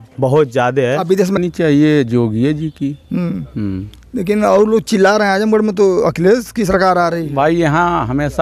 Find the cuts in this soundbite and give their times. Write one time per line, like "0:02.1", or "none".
0:01.4